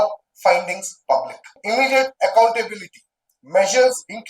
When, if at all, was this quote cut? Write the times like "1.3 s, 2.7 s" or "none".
1.6 s